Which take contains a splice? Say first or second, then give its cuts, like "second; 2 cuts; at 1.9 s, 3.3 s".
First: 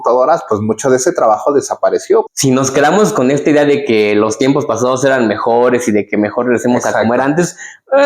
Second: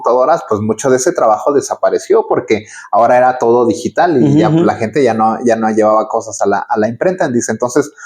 first; 1 cut; at 2.3 s